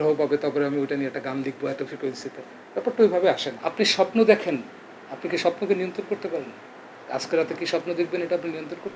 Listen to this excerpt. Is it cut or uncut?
cut